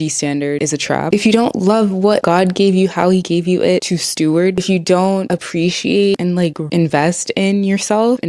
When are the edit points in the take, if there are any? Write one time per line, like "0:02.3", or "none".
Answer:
0:00.9
0:04.6
0:06.2